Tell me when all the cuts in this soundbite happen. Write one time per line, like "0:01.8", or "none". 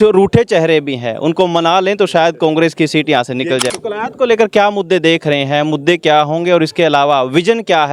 0:03.6